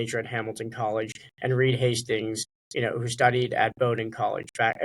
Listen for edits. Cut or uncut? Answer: uncut